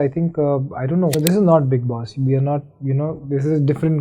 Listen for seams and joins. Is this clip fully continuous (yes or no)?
no